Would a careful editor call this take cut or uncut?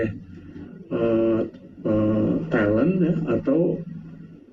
uncut